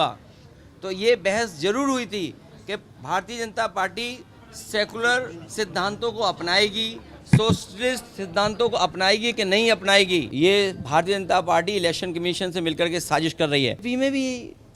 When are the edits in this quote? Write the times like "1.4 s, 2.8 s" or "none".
10.3 s, 13.8 s